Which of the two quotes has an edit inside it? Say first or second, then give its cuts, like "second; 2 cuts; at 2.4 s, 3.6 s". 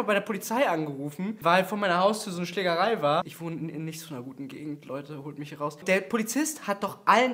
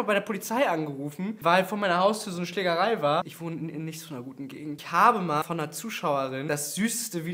second; 3 cuts; at 4.8 s, 5.4 s, 6.4 s